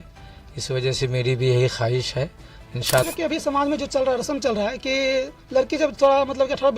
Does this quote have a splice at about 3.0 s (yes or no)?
yes